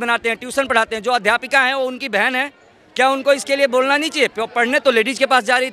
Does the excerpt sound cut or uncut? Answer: uncut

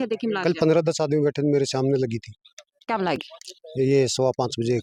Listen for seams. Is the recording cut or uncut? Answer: uncut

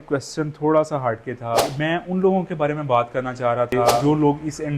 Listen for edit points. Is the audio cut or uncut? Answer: cut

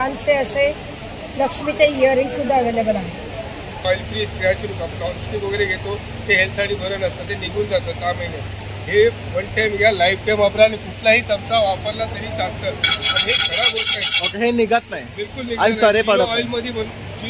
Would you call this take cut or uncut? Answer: cut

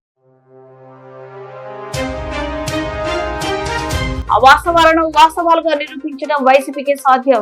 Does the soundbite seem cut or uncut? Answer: uncut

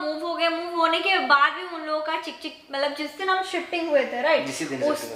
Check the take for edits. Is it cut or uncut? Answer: uncut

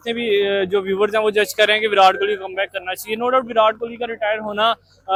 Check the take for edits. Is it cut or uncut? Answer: uncut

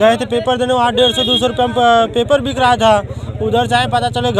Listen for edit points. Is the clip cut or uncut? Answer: uncut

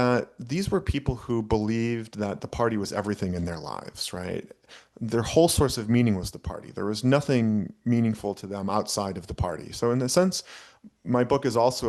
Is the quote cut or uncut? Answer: uncut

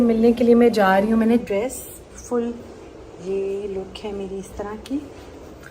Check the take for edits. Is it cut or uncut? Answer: cut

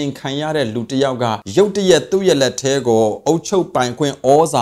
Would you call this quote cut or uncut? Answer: cut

